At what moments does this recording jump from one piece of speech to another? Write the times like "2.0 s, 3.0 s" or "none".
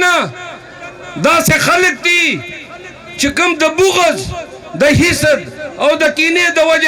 none